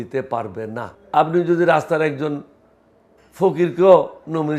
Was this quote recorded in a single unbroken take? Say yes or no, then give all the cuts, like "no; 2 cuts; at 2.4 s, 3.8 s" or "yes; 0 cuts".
no; 1 cut; at 0.9 s